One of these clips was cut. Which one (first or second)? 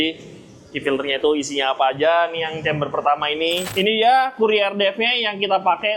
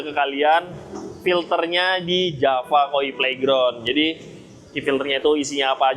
first